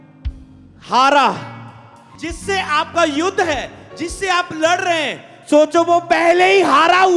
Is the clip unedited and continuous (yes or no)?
no